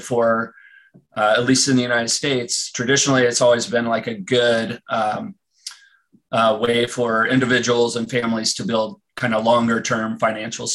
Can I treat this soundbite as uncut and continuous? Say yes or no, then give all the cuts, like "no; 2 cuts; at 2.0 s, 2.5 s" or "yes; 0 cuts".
yes; 0 cuts